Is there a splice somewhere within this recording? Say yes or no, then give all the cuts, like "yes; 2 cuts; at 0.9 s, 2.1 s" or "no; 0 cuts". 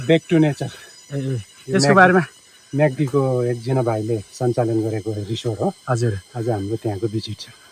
no; 0 cuts